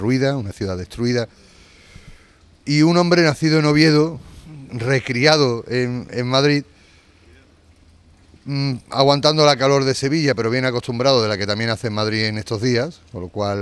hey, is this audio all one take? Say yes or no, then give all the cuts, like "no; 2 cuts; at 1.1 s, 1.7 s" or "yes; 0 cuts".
yes; 0 cuts